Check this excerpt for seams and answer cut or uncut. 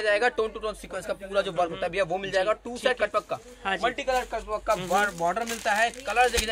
uncut